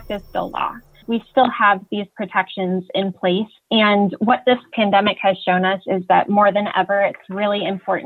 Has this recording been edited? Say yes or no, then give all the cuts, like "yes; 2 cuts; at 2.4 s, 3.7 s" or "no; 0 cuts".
yes; 1 cut; at 1.0 s